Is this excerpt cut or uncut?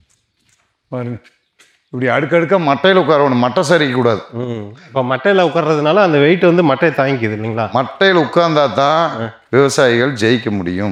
uncut